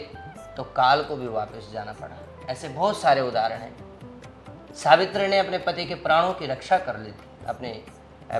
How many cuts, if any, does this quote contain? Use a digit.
0